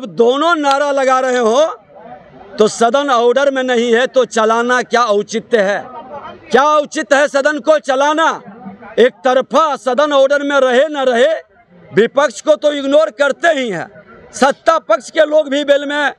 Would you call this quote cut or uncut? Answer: uncut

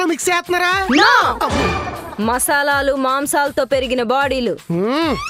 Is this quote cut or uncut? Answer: uncut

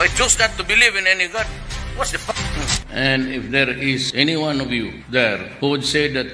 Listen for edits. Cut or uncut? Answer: cut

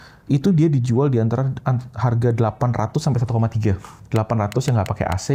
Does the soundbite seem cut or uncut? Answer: uncut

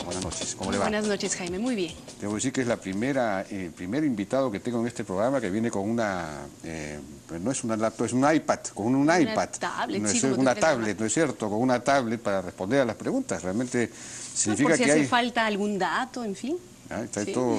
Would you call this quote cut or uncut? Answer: uncut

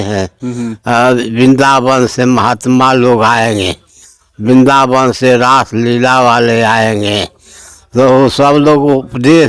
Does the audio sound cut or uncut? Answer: uncut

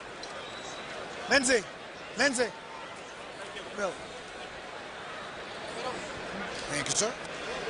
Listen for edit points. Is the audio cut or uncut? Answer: uncut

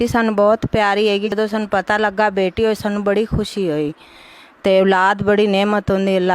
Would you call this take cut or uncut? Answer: cut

